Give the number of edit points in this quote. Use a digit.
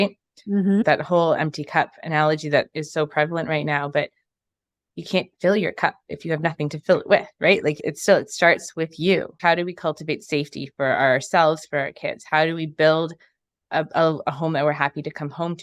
2